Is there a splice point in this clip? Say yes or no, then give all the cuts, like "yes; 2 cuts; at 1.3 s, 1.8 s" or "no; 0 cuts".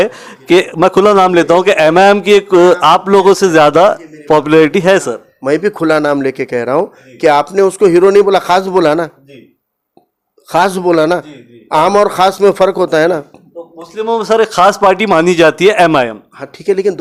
no; 0 cuts